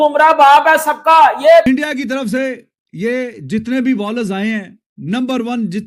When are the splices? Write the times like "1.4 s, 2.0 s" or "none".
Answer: 1.6 s